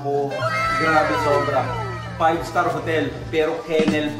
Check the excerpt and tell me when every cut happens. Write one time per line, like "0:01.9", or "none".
none

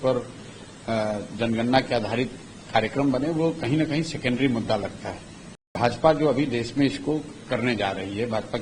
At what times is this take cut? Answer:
0:05.7

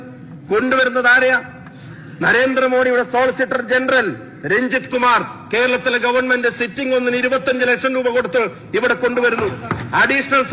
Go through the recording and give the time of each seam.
none

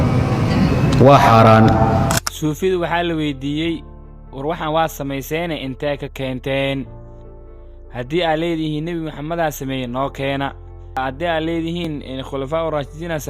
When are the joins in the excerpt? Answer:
0:02.3
0:11.0

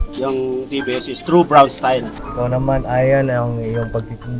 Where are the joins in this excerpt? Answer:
0:02.2

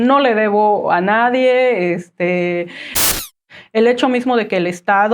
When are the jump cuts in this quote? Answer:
0:03.2

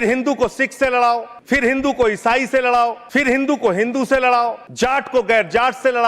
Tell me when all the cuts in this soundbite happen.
0:01.3
0:03.0
0:04.6

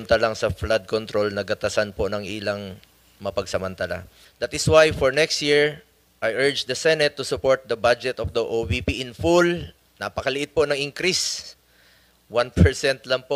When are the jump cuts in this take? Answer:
0:04.2

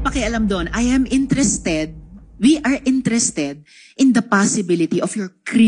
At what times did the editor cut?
none

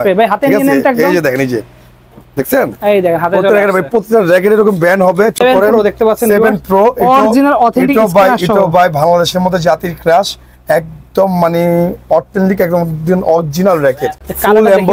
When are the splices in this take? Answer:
0:05.4
0:14.1

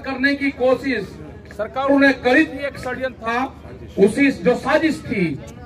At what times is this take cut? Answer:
none

